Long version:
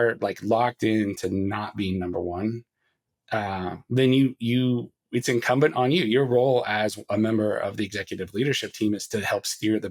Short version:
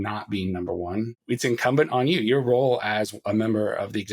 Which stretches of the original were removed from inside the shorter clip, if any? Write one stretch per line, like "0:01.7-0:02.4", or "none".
0:02.6-0:05.0